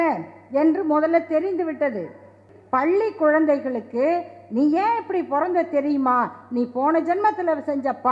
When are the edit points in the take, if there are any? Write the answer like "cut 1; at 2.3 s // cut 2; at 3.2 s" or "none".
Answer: cut 1; at 2.5 s